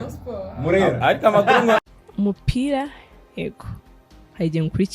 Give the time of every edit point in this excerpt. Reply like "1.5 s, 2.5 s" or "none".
1.8 s